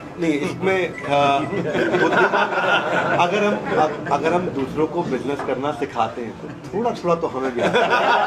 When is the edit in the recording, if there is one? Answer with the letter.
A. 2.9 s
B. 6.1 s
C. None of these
C